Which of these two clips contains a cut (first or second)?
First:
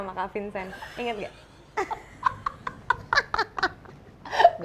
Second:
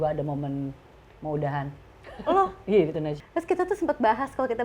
second